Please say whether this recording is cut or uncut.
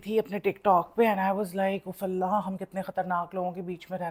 uncut